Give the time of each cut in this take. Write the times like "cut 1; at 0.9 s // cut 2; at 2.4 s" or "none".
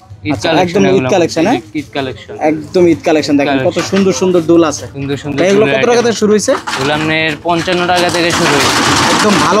none